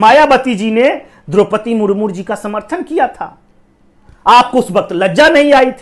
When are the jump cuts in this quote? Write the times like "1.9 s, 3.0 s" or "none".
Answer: none